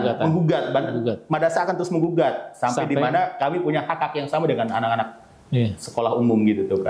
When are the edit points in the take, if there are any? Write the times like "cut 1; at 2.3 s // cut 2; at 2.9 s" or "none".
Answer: none